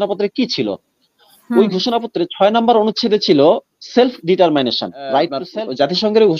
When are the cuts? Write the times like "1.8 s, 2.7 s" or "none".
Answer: 5.5 s